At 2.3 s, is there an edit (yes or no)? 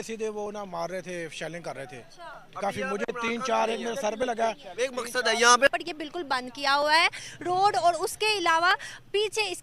no